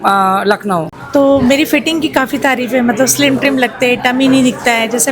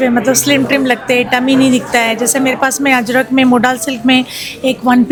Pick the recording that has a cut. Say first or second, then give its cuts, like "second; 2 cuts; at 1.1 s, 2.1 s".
first; 1 cut; at 0.9 s